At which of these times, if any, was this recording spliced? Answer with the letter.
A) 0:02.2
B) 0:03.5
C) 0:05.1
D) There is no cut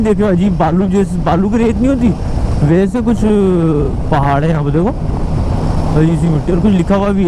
D